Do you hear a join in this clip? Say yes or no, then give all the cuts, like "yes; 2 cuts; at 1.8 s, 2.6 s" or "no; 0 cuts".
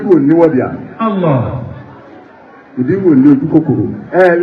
no; 0 cuts